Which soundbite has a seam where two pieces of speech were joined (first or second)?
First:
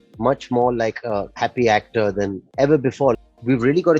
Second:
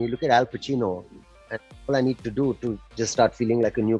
first